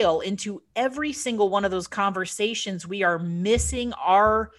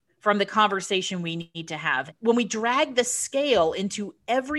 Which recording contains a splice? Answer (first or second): second